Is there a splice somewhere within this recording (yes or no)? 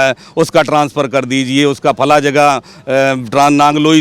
no